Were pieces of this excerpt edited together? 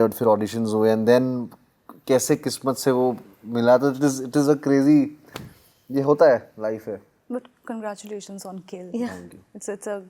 no; 0 cuts

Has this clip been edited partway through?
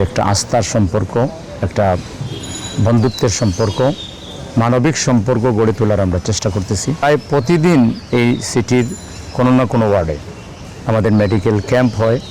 yes; 1 cut; at 7.0 s

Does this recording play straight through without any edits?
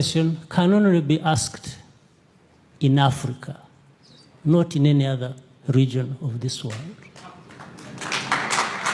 yes; 0 cuts

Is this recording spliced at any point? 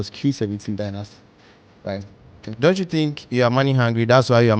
yes; 1 cut; at 2.5 s

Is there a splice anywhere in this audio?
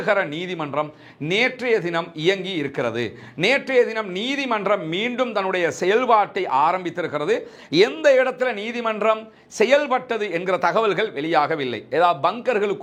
no; 0 cuts

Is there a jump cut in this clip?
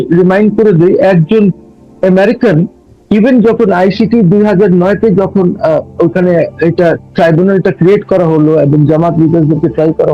no; 0 cuts

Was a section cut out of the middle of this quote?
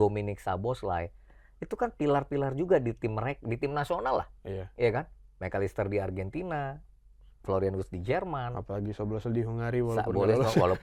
no; 0 cuts

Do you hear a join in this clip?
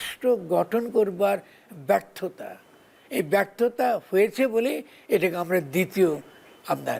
no; 0 cuts

